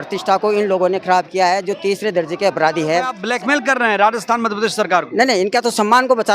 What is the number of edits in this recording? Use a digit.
1